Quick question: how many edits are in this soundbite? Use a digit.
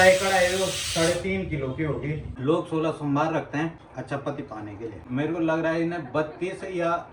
3